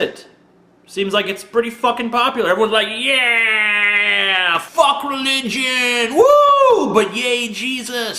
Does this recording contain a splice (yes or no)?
yes